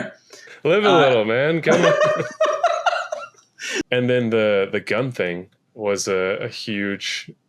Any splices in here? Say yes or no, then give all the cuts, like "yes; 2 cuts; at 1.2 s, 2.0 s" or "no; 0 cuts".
yes; 1 cut; at 3.9 s